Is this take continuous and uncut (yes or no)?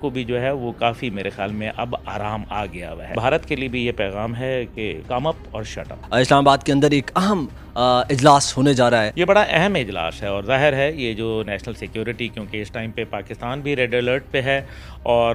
no